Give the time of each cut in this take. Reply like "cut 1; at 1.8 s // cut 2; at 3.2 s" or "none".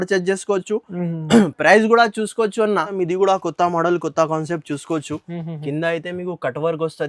cut 1; at 2.9 s